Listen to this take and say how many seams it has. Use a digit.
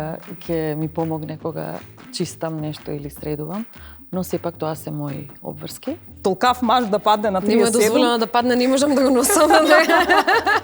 1